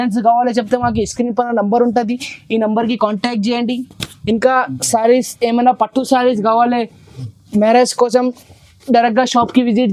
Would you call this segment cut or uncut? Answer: uncut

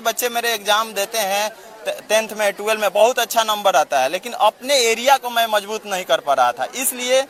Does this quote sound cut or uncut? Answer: uncut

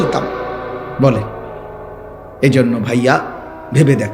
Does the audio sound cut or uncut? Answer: uncut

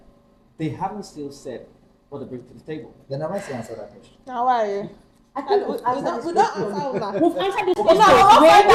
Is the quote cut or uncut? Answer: uncut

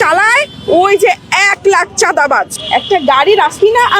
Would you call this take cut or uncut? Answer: cut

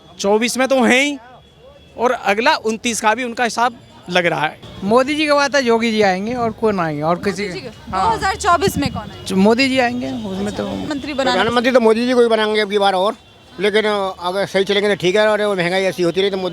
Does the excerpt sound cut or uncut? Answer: cut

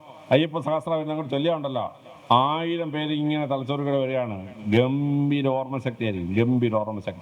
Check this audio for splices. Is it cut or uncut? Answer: uncut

